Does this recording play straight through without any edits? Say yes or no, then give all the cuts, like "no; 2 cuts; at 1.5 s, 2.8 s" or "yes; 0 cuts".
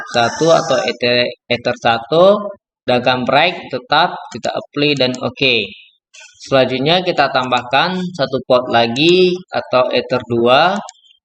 yes; 0 cuts